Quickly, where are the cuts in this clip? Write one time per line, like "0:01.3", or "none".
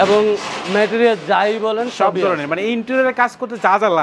none